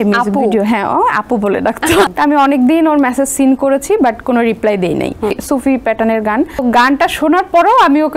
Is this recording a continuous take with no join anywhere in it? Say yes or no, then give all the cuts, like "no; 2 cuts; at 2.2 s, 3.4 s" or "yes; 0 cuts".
no; 3 cuts; at 2.1 s, 5.4 s, 6.6 s